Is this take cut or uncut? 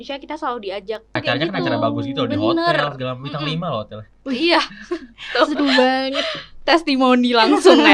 cut